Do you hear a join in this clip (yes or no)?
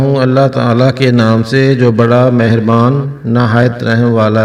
no